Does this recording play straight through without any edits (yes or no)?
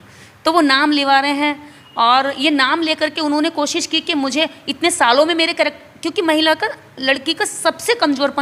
yes